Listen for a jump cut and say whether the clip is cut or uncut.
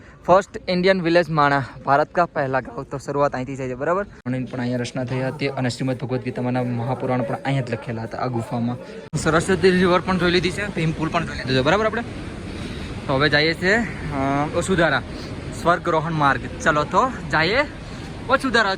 cut